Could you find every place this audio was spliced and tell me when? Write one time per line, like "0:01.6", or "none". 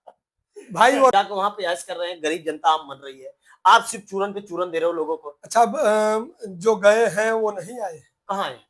0:01.1